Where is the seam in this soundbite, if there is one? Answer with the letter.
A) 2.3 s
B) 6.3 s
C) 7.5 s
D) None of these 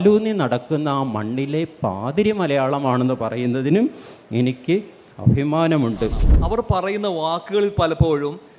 B